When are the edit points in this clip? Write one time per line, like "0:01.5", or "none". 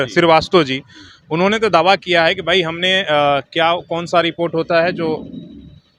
none

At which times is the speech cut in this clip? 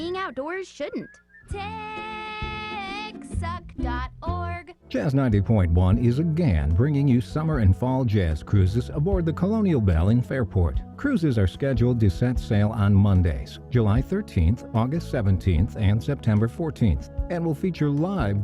0:04.7

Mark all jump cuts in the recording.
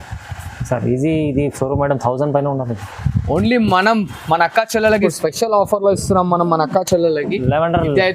0:05.1

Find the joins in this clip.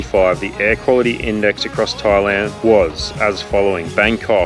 none

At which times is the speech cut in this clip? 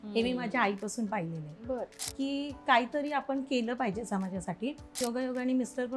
0:02.0
0:05.0

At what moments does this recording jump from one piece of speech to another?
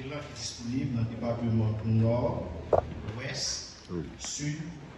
none

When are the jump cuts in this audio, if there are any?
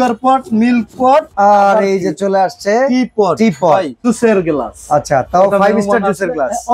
0:01.3
0:04.0

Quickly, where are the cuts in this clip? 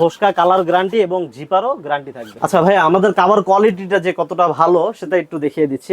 0:02.3

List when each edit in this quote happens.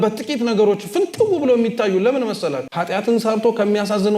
0:02.8

